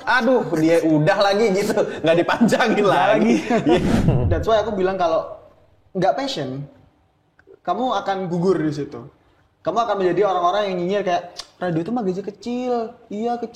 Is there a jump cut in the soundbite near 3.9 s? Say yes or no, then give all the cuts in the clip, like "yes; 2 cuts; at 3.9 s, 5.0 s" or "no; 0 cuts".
yes; 1 cut; at 3.9 s